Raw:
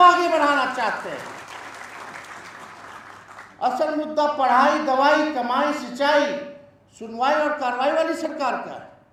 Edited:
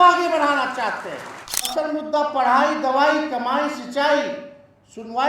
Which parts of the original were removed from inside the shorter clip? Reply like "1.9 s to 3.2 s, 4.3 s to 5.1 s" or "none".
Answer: 1.8 s to 3.8 s

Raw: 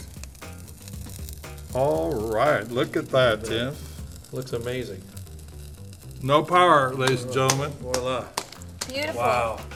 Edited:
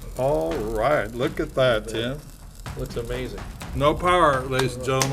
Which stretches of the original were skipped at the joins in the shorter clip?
5.1 s to 6.0 s

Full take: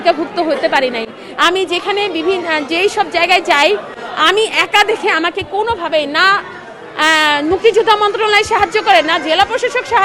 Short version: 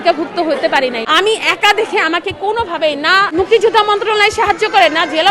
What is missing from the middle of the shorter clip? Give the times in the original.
1.0 s to 4.1 s, 6.4 s to 7.4 s

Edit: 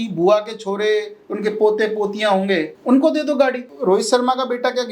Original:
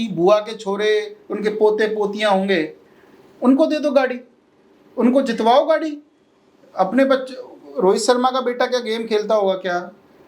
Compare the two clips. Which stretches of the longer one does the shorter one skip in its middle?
2.7 s to 3.3 s, 4.2 s to 7.6 s

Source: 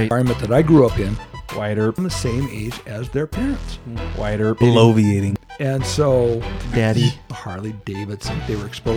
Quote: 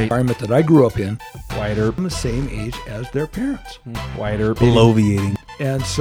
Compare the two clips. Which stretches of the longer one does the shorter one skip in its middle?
none

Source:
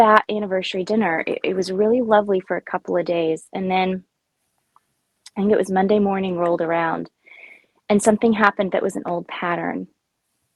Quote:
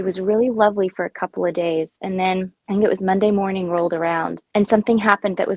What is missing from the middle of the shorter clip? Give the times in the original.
4.1 s to 5.2 s, 7.1 s to 7.7 s

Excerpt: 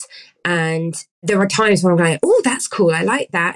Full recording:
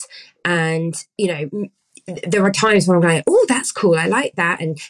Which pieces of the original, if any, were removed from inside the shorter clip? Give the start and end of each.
1.0 s to 2.1 s

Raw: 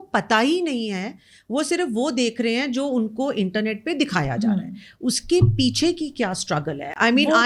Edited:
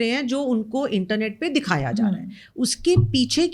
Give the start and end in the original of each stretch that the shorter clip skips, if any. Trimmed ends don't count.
none

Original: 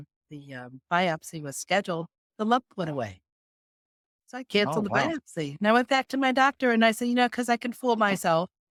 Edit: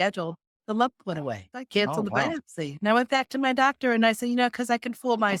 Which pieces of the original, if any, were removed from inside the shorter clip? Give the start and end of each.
3.2 s to 4.3 s

